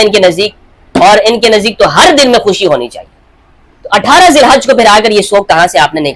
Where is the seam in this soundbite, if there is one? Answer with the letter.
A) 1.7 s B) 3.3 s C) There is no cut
C